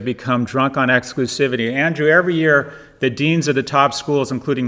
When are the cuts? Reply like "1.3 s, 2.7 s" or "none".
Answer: none